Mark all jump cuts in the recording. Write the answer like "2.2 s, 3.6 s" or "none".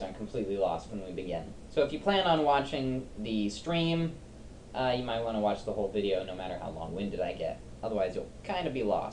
2.6 s